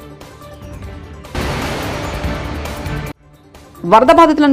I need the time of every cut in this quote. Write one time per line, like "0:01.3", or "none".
none

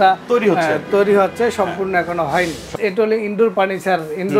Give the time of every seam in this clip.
0:02.7

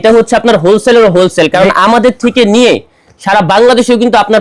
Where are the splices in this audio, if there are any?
none

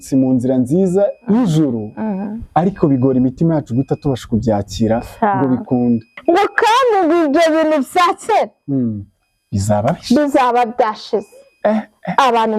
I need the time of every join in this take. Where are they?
0:06.1

